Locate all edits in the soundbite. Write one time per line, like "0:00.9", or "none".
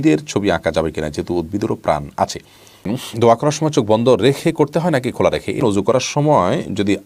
0:02.9
0:05.6